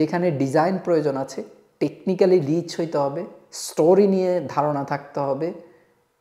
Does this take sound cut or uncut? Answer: uncut